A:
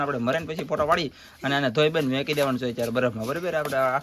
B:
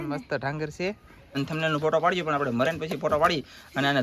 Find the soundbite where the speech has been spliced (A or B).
B